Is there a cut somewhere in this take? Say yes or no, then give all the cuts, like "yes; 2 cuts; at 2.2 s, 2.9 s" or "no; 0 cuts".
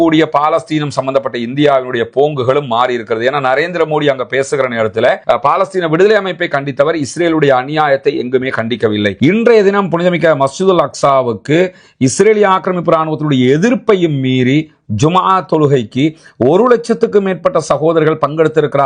yes; 2 cuts; at 5.2 s, 9.1 s